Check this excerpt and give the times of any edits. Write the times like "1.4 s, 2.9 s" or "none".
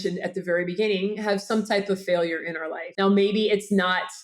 2.8 s